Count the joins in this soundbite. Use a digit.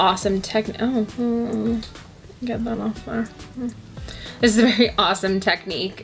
0